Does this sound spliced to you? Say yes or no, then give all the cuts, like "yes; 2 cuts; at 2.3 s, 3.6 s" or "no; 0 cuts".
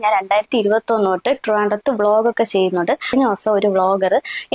no; 0 cuts